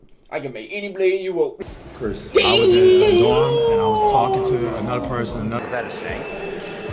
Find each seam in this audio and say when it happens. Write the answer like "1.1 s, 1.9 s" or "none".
1.6 s, 5.6 s